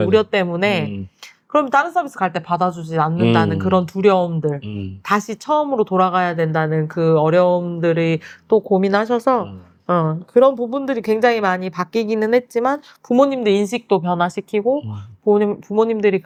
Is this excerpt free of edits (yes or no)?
yes